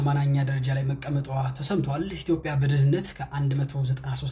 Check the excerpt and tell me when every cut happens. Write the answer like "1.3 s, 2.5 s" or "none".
none